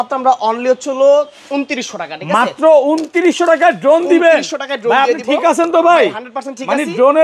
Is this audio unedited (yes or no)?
yes